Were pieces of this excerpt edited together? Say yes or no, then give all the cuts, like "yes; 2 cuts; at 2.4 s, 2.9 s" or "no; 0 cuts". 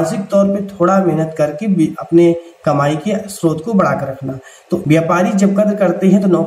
yes; 1 cut; at 4.8 s